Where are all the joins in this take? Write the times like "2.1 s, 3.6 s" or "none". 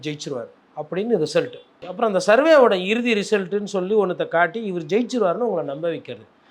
1.8 s